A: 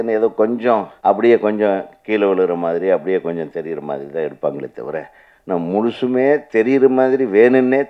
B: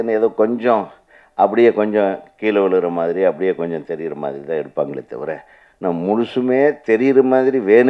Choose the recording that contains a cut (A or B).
A